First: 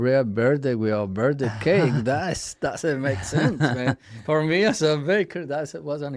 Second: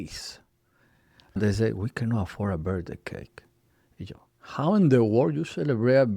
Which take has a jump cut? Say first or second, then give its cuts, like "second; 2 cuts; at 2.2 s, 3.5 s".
second; 1 cut; at 1.4 s